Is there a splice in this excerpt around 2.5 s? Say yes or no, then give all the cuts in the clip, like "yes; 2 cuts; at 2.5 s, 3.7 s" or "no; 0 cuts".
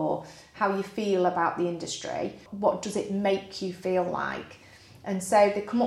yes; 1 cut; at 2.5 s